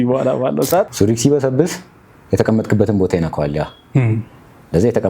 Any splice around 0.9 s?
yes; 1 cut; at 0.9 s

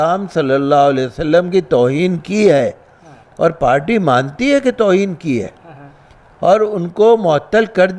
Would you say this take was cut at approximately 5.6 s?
no; 0 cuts

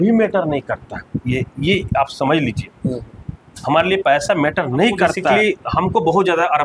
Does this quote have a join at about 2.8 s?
no; 1 cut; at 5.4 s

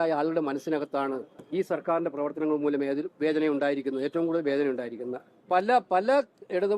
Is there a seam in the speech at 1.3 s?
yes; 2 cuts; at 1.3 s, 5.3 s

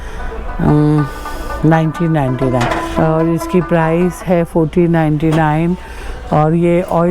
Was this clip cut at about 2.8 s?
yes; 1 cut; at 2.8 s

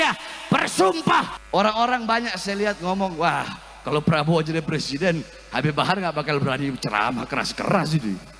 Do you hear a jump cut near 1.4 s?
yes; 1 cut; at 1.4 s

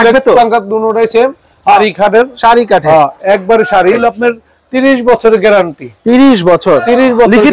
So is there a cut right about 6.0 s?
no; 2 cuts; at 1.8 s, 4.0 s

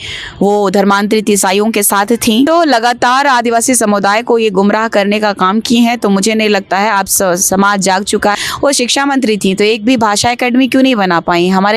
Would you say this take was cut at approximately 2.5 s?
yes; 2 cuts; at 2.5 s, 8.3 s

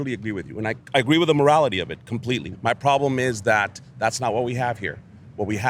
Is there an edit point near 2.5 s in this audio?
yes; 1 cut; at 2.5 s

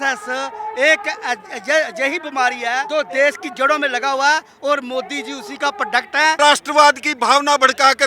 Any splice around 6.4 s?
yes; 2 cuts; at 2.8 s, 6.4 s

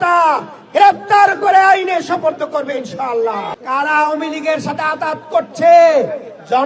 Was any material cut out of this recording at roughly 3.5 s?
yes; 1 cut; at 3.5 s

